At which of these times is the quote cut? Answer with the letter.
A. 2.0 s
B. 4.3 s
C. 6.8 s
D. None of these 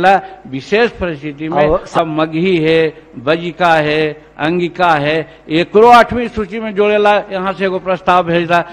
A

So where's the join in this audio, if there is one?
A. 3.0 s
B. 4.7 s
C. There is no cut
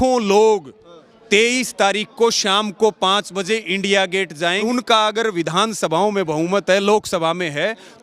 B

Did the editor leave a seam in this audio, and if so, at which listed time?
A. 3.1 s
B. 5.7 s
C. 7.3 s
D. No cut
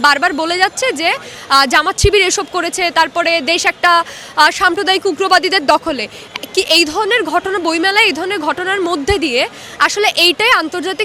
D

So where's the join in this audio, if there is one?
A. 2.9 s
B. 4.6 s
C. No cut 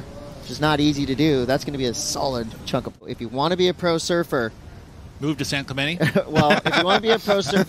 A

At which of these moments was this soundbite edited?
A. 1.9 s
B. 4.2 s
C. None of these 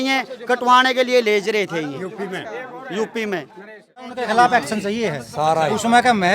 B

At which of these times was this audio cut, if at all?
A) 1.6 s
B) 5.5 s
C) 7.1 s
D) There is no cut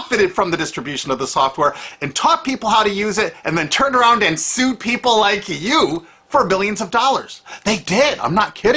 B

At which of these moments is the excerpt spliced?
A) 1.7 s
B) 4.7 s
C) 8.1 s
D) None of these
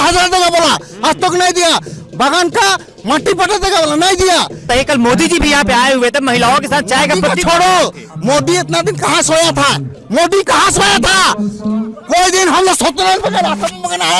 B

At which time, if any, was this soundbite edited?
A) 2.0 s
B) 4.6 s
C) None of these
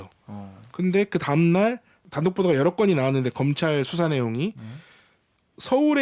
A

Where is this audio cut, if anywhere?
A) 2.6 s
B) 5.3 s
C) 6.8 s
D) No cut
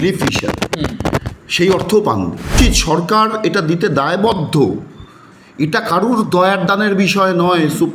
A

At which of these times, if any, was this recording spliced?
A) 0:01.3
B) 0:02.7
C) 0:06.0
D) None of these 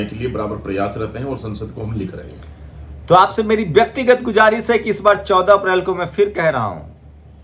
D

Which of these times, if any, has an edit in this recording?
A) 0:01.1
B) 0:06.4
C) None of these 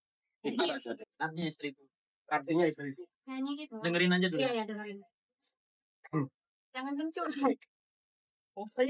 A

